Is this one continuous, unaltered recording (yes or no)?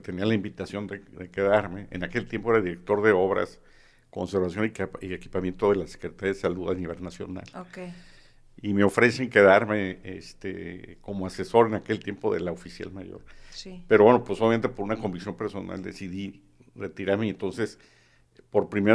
yes